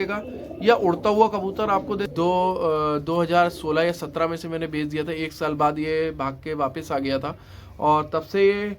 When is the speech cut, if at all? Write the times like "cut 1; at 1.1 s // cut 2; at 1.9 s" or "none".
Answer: cut 1; at 2.1 s